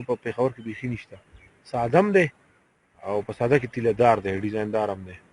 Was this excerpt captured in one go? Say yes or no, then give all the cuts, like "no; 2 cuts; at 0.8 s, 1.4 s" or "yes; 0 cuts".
yes; 0 cuts